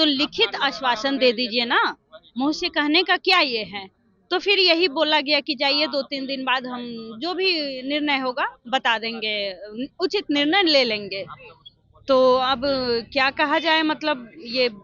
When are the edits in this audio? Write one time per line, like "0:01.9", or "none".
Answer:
none